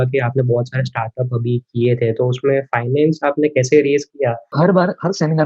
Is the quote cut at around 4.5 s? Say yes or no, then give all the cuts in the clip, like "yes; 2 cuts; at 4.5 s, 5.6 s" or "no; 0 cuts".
yes; 1 cut; at 4.5 s